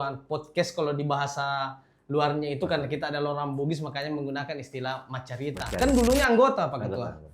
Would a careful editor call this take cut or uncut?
cut